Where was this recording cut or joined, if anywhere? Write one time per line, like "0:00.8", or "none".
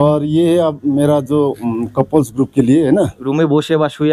0:03.2